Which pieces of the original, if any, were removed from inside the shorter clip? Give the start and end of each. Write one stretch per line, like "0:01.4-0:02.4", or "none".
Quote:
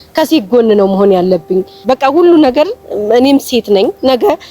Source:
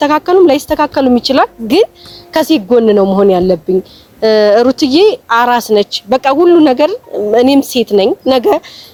0:03.9-0:06.0